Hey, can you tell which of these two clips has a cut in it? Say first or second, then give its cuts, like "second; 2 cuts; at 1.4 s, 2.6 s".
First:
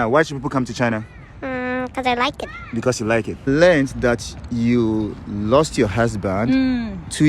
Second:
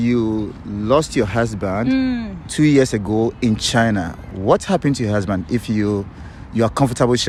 first; 1 cut; at 3.3 s